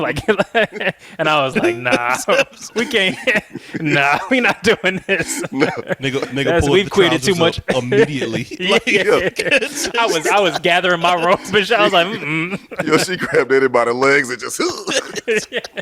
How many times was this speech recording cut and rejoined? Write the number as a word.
zero